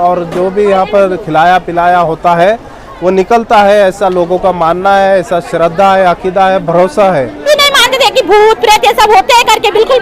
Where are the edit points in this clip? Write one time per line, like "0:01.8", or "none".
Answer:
0:07.4